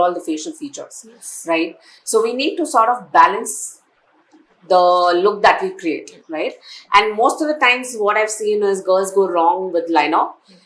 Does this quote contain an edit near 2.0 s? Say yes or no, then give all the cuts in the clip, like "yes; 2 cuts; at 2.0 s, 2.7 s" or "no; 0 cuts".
no; 0 cuts